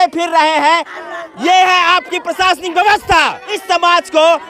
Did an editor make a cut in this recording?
yes; 2 cuts; at 0.9 s, 3.5 s

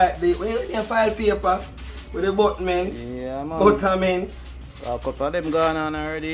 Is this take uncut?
yes; 0 cuts

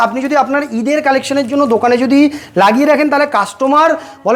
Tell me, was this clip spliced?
no; 0 cuts

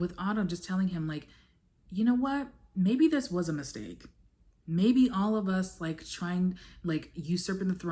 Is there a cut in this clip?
no; 0 cuts

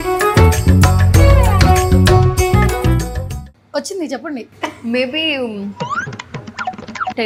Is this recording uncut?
yes; 0 cuts

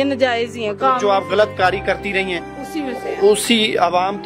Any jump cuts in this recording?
no; 0 cuts

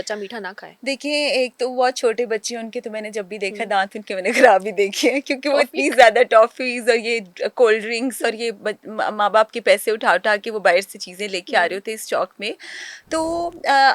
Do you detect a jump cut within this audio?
no; 0 cuts

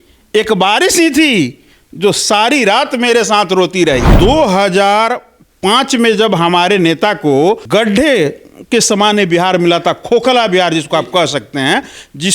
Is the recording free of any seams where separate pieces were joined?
no; 2 cuts; at 4.1 s, 7.6 s

